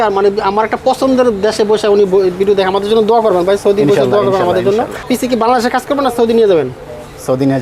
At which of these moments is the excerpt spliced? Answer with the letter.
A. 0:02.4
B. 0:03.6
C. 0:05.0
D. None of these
C